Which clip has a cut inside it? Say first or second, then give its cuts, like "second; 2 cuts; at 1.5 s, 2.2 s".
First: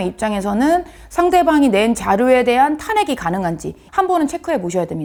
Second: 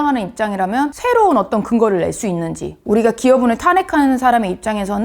second; 2 cuts; at 1.0 s, 2.8 s